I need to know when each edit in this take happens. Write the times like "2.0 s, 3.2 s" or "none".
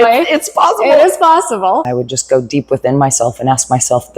1.9 s